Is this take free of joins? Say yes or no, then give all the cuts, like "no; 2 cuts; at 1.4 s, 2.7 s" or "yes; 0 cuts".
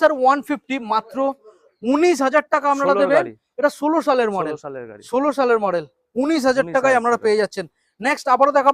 yes; 0 cuts